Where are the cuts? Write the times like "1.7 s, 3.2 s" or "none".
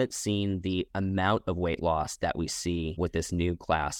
2.9 s